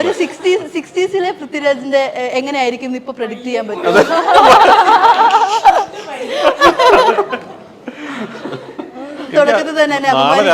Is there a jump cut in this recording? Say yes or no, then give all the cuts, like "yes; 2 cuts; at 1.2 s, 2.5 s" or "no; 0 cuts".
no; 0 cuts